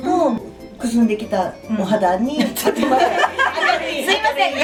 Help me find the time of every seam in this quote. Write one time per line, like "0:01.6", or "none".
none